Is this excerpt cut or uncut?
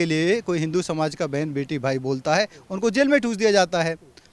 uncut